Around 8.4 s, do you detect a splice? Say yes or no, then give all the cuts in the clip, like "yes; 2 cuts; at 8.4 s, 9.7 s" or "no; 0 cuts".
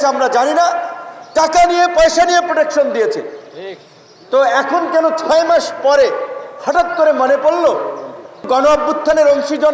yes; 1 cut; at 8.4 s